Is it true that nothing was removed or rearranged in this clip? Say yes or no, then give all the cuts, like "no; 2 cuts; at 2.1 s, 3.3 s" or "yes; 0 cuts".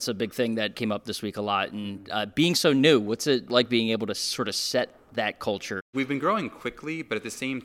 no; 3 cuts; at 0.8 s, 3.5 s, 5.8 s